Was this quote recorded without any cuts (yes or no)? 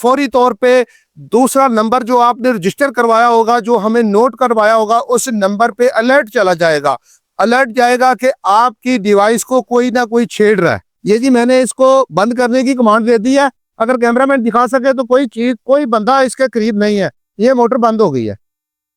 no